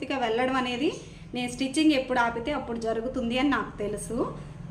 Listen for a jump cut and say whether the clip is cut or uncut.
uncut